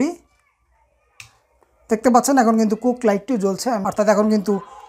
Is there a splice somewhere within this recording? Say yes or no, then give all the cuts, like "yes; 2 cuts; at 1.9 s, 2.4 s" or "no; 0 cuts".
yes; 1 cut; at 3.9 s